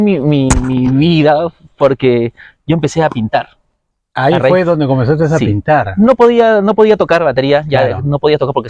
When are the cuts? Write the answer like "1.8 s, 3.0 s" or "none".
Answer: none